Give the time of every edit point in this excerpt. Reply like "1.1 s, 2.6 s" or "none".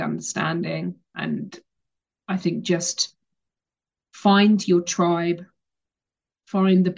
1.1 s